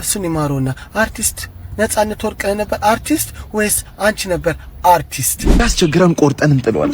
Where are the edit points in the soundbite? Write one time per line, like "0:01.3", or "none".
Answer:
0:05.6